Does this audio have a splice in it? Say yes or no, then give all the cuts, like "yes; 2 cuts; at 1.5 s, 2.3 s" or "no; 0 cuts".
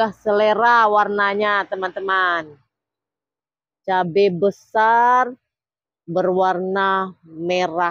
no; 0 cuts